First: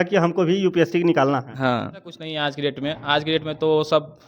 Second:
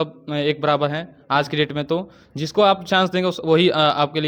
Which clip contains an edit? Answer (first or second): first